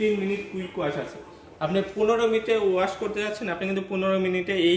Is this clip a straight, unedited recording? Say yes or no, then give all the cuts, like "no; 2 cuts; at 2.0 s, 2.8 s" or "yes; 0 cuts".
yes; 0 cuts